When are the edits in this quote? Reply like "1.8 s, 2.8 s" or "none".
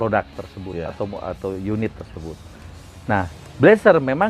none